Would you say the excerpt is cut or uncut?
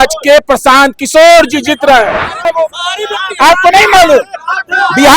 cut